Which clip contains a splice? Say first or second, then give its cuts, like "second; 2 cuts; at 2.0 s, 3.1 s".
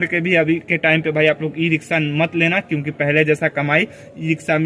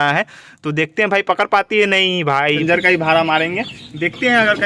second; 1 cut; at 2.6 s